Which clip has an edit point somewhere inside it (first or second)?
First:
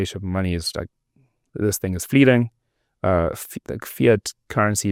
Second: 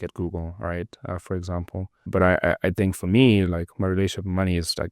second